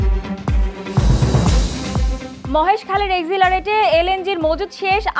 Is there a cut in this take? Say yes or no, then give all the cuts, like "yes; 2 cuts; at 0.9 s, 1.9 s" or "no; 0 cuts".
yes; 1 cut; at 2.3 s